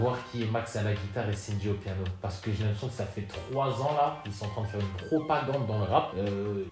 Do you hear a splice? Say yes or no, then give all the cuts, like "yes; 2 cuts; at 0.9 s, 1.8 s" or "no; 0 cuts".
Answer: no; 0 cuts